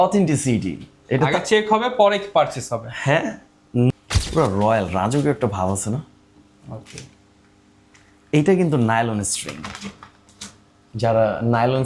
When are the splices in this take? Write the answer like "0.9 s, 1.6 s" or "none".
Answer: 3.9 s